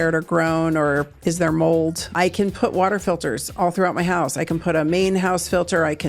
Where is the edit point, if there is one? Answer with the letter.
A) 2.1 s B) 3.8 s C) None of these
A